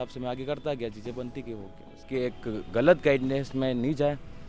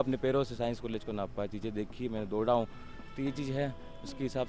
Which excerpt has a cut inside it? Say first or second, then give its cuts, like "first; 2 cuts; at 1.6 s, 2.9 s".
first; 1 cut; at 2.0 s